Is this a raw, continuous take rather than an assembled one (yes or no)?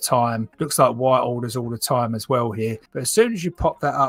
yes